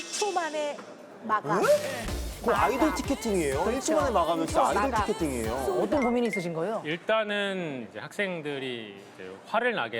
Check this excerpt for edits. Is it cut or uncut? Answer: cut